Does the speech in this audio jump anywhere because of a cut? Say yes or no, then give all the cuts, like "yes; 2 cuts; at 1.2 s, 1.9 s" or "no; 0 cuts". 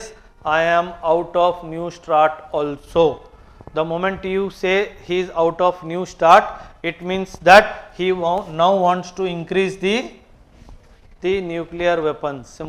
no; 0 cuts